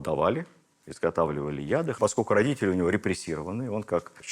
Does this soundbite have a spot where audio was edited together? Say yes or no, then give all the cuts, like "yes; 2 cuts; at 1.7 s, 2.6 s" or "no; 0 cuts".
yes; 1 cut; at 1.9 s